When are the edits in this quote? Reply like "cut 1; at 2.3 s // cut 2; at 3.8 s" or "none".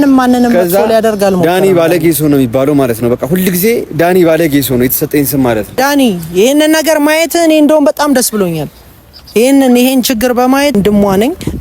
cut 1; at 5.8 s // cut 2; at 10.7 s